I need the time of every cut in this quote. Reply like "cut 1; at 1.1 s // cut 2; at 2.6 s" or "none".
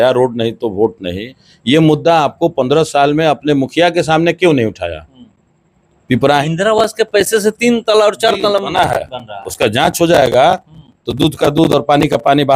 cut 1; at 6.4 s